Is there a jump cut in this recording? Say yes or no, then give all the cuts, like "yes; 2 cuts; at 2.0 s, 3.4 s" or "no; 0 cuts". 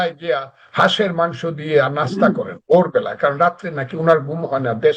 no; 0 cuts